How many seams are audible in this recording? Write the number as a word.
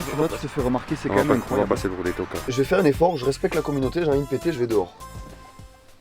one